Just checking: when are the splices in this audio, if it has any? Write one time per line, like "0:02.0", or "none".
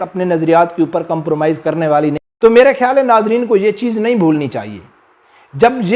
0:02.2